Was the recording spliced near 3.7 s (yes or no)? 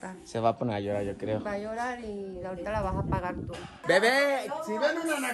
yes